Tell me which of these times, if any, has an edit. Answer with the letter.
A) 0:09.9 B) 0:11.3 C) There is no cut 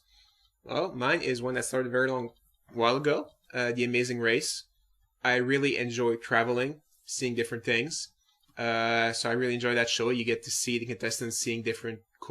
A